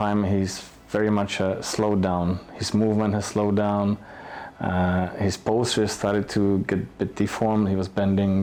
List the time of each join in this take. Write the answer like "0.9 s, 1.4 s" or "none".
none

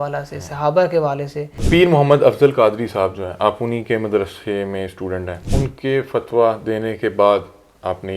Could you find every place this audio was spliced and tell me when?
1.5 s, 5.4 s

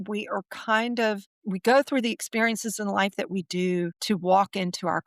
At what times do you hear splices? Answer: 1.3 s, 4.0 s

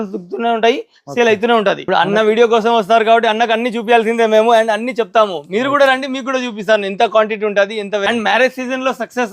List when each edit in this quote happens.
1.8 s, 8.1 s

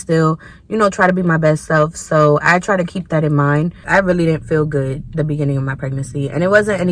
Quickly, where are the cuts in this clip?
3.8 s

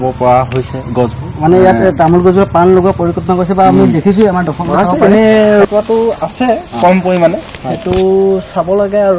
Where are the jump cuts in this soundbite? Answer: 5.6 s

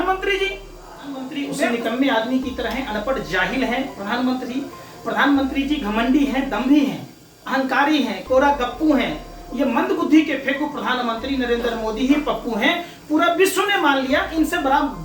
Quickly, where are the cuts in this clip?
1.3 s

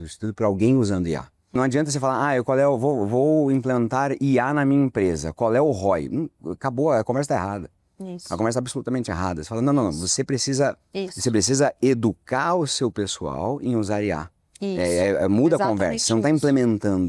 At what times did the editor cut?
1.6 s

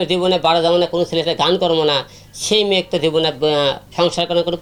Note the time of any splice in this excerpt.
none

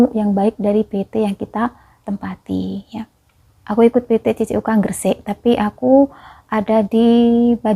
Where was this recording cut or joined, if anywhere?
none

